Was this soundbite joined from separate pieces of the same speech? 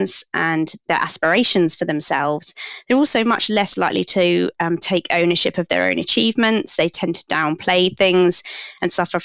no; 0 cuts

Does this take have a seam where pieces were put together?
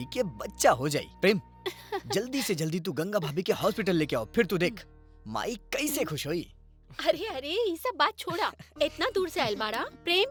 no; 0 cuts

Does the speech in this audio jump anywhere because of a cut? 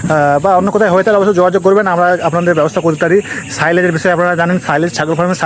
no; 0 cuts

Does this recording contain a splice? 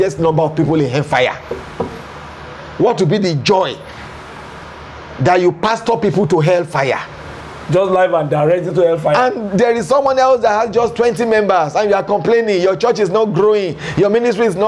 no; 0 cuts

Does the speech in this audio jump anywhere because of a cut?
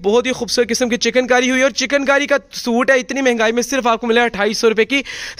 no; 0 cuts

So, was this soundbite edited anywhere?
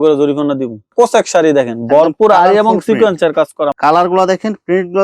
yes; 2 cuts; at 0.9 s, 3.7 s

